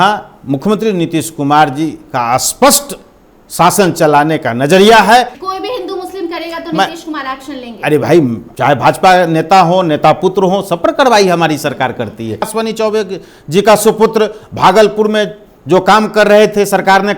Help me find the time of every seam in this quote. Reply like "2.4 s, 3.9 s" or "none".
5.4 s, 8.4 s, 12.5 s